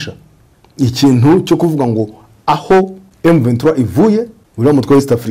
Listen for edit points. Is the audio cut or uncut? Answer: cut